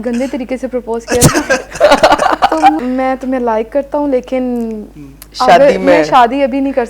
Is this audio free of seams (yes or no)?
no